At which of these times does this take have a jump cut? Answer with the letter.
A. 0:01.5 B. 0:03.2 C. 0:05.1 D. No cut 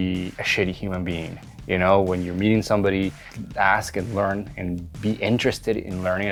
D